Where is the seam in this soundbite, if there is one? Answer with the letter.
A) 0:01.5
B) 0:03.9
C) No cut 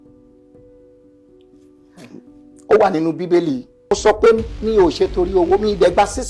B